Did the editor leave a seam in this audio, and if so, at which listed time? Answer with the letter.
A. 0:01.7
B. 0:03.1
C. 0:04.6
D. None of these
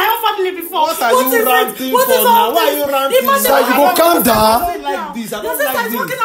D